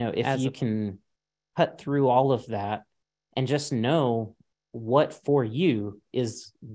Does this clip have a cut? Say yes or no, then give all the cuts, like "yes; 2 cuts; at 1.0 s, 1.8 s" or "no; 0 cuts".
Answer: no; 0 cuts